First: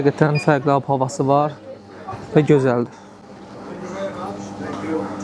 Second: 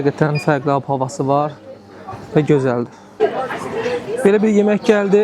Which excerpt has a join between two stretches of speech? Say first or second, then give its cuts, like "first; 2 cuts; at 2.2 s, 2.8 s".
second; 1 cut; at 3.2 s